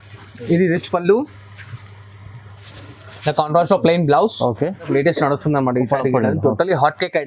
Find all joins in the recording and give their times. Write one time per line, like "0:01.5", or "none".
0:04.9